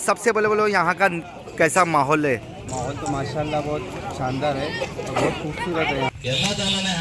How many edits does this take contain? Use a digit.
1